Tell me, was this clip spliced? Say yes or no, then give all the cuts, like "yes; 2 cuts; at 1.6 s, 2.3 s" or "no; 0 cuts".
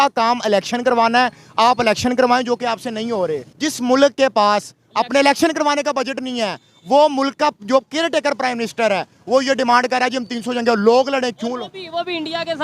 yes; 1 cut; at 3.5 s